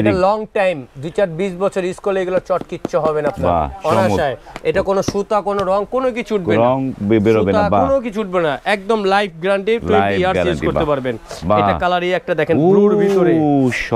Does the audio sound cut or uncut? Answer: uncut